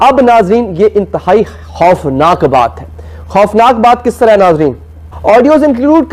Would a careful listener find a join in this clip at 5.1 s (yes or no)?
yes